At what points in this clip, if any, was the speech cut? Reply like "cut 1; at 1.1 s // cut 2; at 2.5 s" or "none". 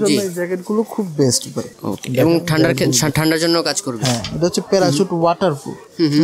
none